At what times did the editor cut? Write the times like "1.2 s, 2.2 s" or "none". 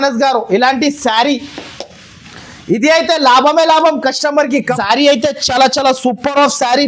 4.7 s